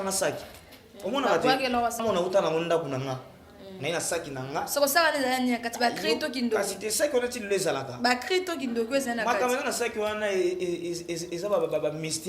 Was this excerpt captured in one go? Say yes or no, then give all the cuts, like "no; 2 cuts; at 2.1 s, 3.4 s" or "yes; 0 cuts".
no; 1 cut; at 2.0 s